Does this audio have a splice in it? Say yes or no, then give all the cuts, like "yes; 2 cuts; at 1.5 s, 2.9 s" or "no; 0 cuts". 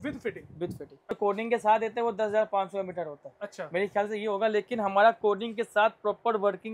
yes; 1 cut; at 1.1 s